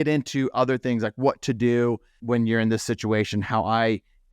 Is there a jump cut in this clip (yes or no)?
yes